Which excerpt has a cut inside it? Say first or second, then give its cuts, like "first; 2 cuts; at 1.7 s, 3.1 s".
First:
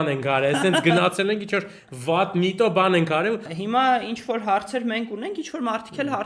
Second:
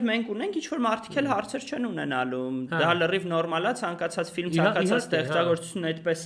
first; 1 cut; at 3.5 s